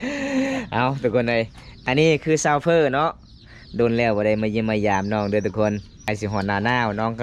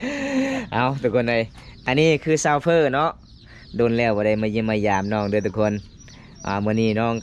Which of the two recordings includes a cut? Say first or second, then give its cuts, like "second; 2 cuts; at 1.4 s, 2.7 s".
first; 1 cut; at 6.0 s